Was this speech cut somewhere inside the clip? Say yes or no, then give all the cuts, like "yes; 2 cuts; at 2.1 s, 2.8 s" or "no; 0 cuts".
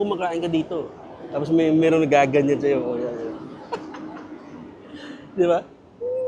no; 0 cuts